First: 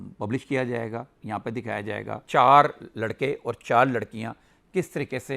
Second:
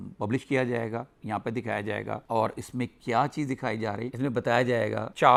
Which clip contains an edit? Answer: first; 1 cut; at 2.2 s

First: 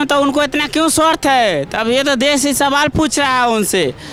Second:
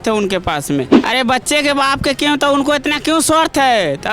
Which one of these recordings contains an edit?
second; 1 cut; at 0.9 s

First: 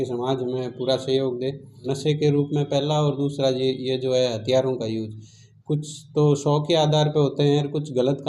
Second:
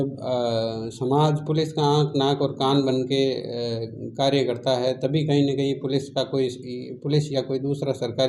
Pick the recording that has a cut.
first; 1 cut; at 1.8 s

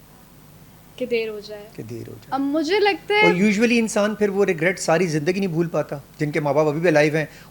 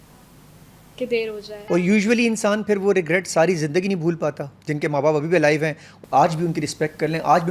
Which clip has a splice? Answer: second; 2 cuts; at 1.7 s, 5.9 s

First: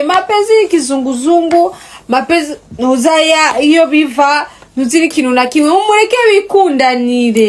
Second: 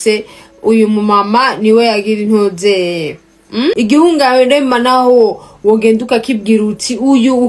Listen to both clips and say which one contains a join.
second; 1 cut; at 3.8 s

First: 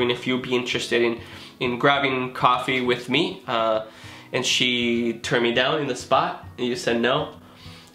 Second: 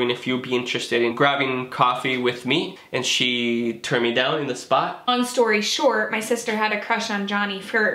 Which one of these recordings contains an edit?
second; 3 cuts; at 1.1 s, 2.8 s, 5.1 s

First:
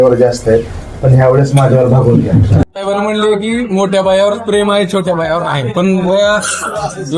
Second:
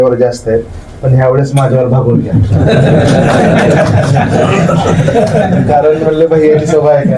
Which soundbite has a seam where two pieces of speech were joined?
first; 1 cut; at 2.6 s

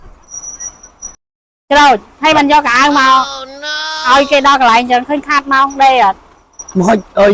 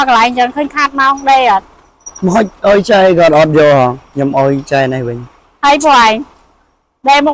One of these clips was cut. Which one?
first; 1 cut; at 1.2 s

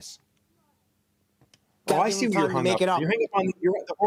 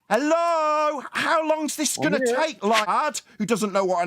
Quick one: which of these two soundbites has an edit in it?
second; 1 cut; at 2.9 s

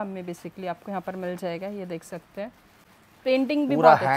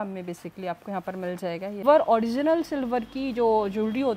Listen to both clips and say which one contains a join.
second; 1 cut; at 1.8 s

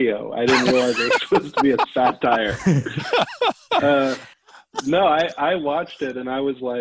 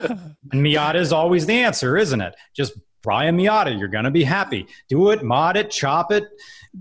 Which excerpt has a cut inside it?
second; 1 cut; at 3.0 s

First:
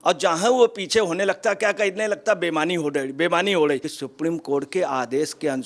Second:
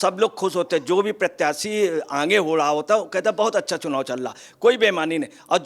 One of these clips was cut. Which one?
first; 1 cut; at 3.9 s

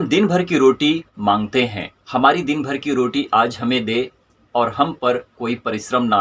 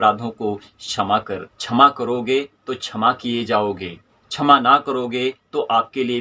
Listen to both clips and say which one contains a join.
first; 1 cut; at 1.1 s

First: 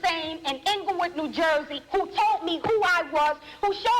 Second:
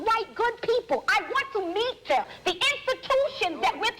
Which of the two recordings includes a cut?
second; 1 cut; at 2.3 s

